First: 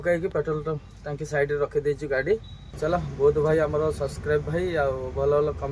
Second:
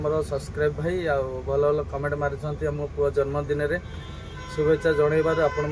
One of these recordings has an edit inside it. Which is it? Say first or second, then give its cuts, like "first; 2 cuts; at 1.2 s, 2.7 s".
first; 1 cut; at 2.7 s